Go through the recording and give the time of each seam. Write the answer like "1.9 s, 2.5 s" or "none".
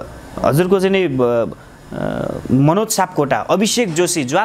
none